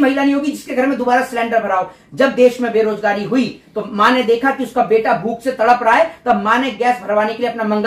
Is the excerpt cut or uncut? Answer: uncut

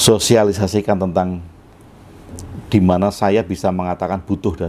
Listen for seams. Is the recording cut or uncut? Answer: uncut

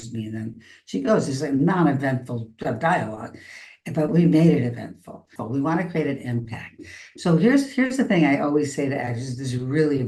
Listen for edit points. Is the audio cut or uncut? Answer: cut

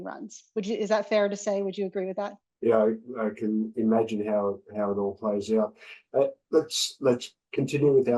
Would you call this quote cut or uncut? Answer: cut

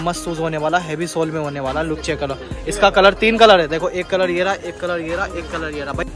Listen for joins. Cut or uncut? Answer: uncut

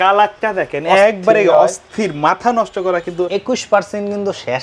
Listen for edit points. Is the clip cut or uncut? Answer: cut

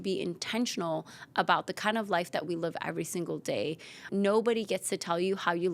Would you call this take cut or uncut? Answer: cut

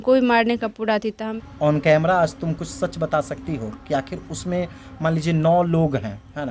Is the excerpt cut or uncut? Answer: cut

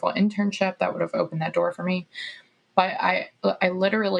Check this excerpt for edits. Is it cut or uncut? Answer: uncut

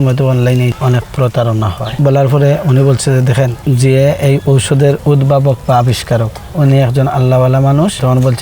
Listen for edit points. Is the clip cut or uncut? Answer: cut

